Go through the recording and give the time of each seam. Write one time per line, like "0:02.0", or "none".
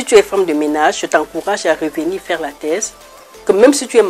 none